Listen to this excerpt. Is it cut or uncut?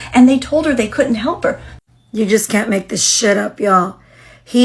cut